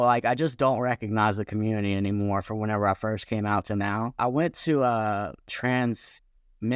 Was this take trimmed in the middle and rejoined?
yes; 1 cut; at 4.2 s

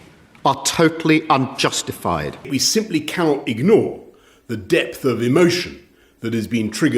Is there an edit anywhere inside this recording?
yes; 1 cut; at 2.5 s

